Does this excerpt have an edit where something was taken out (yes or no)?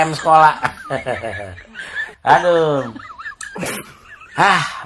no